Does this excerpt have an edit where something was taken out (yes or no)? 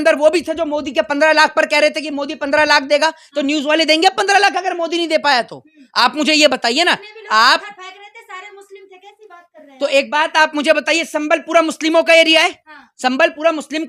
no